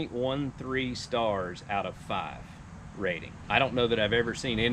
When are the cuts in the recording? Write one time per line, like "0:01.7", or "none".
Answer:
0:03.4